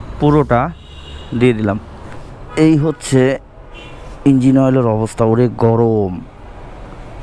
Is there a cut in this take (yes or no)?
yes